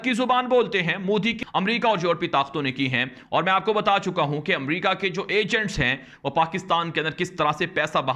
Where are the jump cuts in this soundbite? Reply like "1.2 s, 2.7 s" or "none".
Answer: 1.5 s